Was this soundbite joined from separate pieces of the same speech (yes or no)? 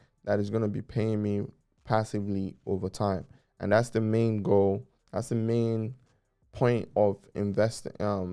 no